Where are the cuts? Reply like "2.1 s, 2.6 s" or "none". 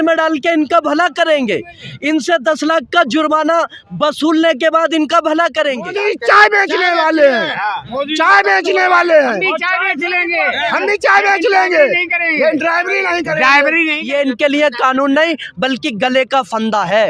5.9 s, 14.0 s